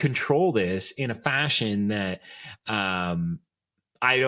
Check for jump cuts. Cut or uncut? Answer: uncut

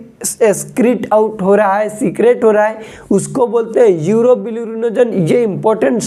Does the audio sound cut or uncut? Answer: uncut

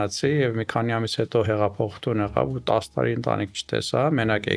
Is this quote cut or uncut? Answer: uncut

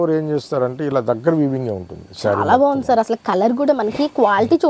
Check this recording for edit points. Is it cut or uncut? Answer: uncut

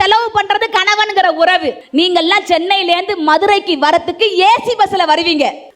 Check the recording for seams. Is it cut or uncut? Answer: cut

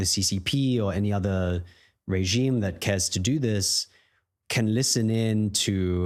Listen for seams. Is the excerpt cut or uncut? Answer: uncut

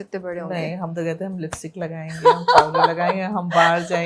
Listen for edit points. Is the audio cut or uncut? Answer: uncut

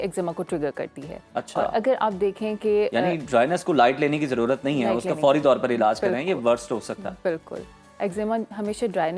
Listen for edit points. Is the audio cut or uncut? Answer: uncut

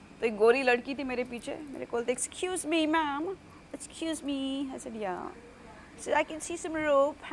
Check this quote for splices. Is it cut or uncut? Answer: uncut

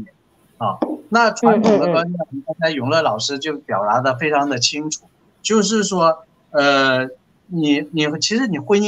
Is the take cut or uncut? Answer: uncut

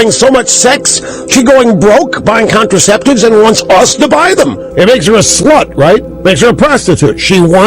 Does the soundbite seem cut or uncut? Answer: cut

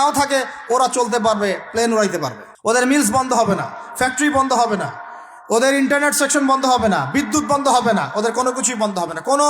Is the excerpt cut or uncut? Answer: cut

